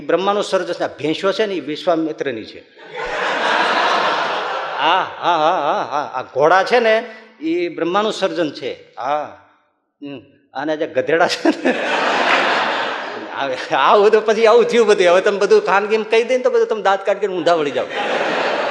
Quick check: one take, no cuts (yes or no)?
yes